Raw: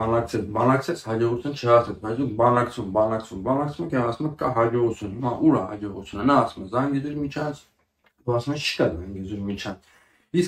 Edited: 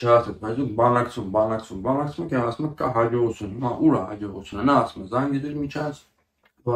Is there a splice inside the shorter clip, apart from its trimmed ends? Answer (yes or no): no